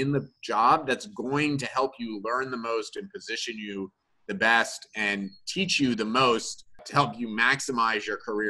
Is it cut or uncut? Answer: cut